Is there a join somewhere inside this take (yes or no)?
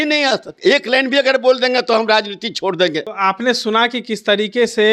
no